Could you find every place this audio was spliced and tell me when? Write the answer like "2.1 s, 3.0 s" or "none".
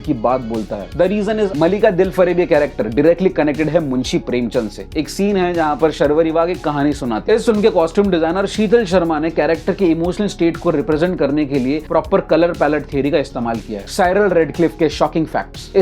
1.5 s, 7.1 s, 13.7 s